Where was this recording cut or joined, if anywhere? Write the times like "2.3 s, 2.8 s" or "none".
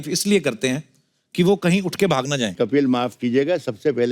2.5 s